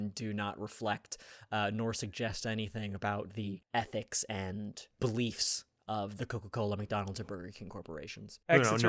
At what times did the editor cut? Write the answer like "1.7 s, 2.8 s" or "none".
3.6 s, 4.9 s